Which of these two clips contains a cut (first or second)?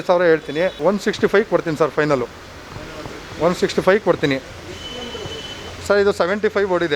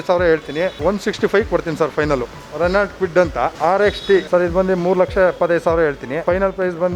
second